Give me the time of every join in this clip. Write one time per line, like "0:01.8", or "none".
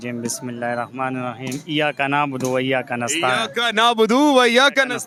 none